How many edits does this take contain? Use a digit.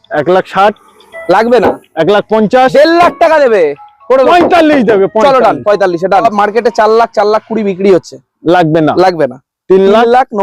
1